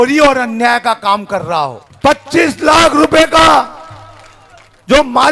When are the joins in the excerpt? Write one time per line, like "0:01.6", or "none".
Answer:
0:01.8